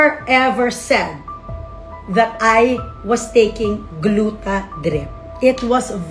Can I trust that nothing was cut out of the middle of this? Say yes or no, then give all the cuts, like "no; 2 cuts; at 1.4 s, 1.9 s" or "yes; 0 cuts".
yes; 0 cuts